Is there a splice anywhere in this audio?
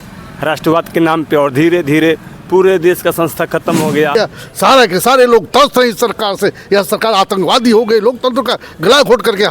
yes; 1 cut; at 4.1 s

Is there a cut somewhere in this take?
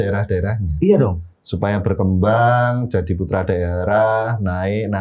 no; 0 cuts

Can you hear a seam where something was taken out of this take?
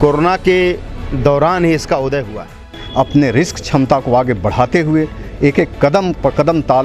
yes; 1 cut; at 2.8 s

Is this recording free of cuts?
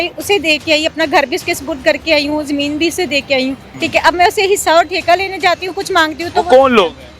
no; 1 cut; at 3.7 s

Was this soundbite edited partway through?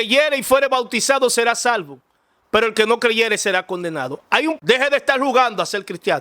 yes; 1 cut; at 4.6 s

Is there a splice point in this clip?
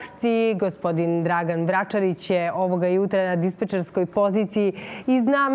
no; 0 cuts

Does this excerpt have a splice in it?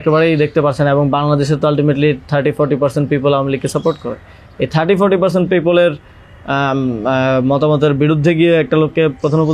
no; 0 cuts

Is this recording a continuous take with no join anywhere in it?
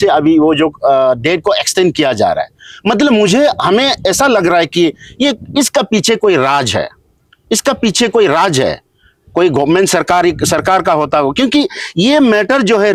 yes; 0 cuts

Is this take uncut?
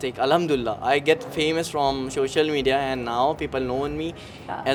yes; 0 cuts

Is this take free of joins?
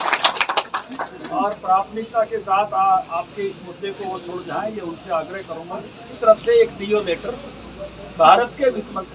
no; 1 cut; at 6.2 s

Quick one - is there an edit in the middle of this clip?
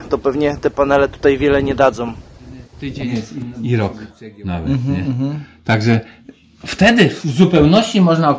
yes; 1 cut; at 3.5 s

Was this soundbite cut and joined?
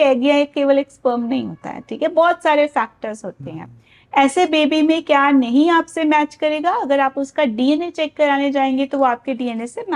no; 0 cuts

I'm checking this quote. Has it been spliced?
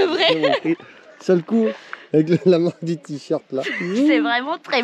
no; 0 cuts

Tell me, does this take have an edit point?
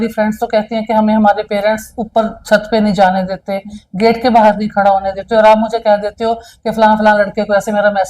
no; 0 cuts

